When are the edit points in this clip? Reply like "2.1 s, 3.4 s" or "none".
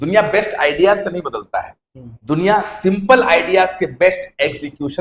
none